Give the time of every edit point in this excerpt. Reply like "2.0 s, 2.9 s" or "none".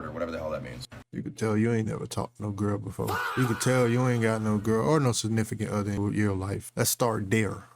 1.0 s, 6.6 s